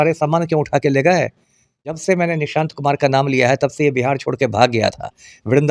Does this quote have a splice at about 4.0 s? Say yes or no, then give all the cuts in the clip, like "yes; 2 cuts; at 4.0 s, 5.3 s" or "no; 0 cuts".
no; 1 cut; at 2.0 s